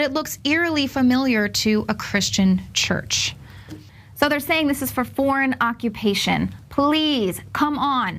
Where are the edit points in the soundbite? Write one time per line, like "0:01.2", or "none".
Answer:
0:01.2